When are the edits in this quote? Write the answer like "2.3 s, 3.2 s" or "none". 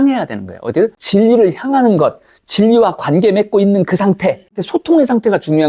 1.0 s, 4.6 s